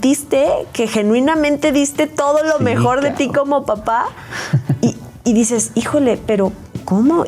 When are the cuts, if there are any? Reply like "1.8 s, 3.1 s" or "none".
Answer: none